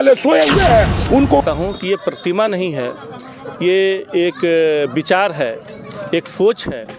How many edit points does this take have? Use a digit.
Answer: 1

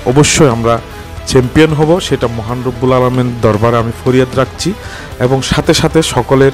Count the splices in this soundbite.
0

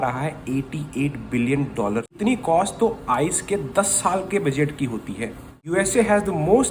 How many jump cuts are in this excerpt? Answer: 2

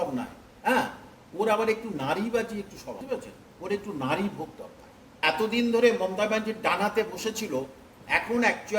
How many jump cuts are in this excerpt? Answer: 2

